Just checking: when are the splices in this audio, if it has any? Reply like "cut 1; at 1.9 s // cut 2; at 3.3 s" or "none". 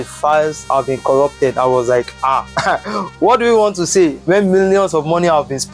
none